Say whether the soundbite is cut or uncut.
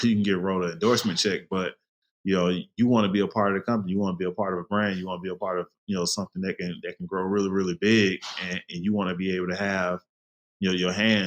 uncut